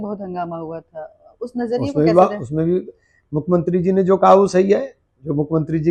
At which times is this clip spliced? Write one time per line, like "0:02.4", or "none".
none